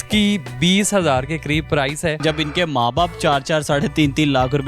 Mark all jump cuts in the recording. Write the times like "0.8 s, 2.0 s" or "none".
2.2 s